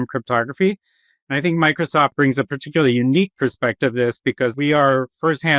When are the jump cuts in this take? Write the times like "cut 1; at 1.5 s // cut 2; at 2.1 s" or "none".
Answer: cut 1; at 2.1 s // cut 2; at 4.5 s